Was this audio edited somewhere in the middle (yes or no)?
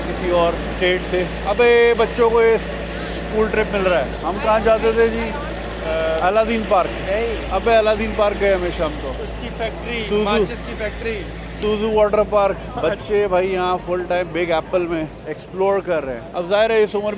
no